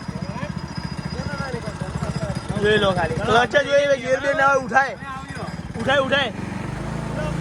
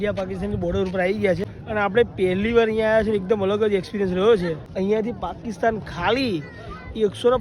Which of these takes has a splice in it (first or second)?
second